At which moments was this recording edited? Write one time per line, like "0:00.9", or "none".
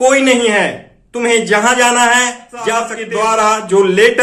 0:03.0